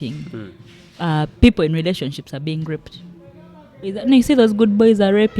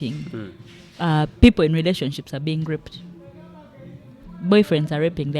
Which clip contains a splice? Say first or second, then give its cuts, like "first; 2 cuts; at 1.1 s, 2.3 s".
first; 1 cut; at 4.0 s